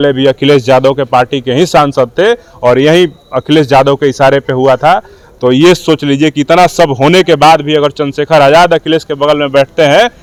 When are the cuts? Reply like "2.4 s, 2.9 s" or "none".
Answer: none